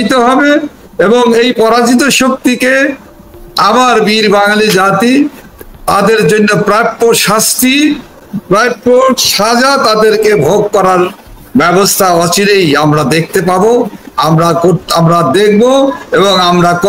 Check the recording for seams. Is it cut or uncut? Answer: uncut